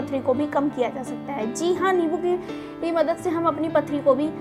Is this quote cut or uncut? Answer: uncut